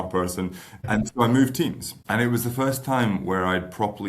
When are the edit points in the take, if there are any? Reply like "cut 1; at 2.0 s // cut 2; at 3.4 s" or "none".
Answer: cut 1; at 1.9 s